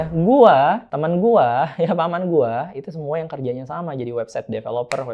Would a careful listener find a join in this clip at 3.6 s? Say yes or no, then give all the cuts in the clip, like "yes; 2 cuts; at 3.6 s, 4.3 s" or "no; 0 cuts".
no; 1 cut; at 0.9 s